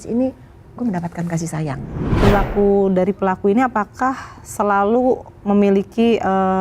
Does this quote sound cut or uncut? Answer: cut